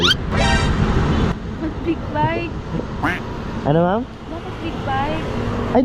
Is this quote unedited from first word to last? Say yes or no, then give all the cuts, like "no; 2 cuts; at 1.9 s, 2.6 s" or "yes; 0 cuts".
yes; 0 cuts